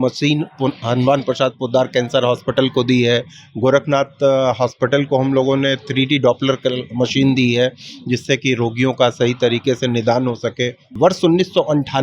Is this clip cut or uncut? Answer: cut